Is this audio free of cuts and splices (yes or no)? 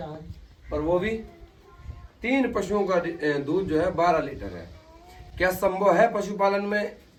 yes